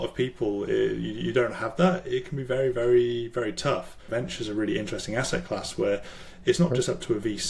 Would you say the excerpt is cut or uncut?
cut